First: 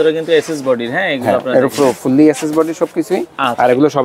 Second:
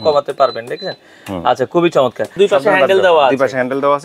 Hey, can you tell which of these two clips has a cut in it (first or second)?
second